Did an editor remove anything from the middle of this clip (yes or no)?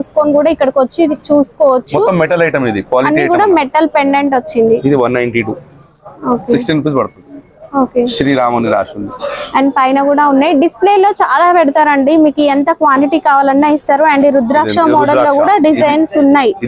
no